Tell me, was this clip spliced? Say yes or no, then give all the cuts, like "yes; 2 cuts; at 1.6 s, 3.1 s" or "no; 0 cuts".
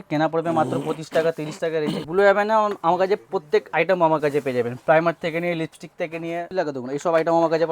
yes; 2 cuts; at 2.0 s, 6.5 s